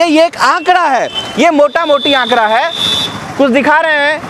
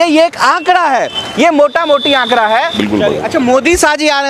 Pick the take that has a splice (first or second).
second